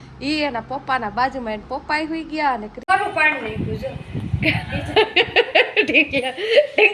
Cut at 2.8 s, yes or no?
yes